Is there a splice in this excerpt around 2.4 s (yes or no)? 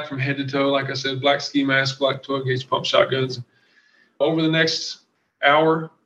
no